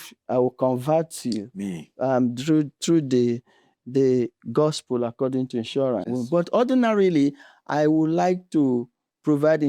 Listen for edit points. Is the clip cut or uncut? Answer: cut